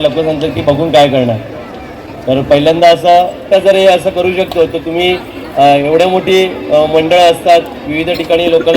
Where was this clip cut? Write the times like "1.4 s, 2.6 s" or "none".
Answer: 3.4 s